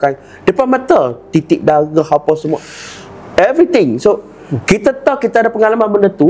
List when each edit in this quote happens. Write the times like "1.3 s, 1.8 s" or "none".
none